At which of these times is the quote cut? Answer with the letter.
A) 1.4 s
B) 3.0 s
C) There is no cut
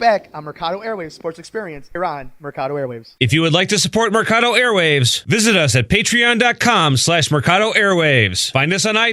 B